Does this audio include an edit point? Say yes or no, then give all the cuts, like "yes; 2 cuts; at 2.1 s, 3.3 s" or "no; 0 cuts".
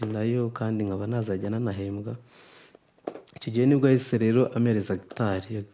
no; 0 cuts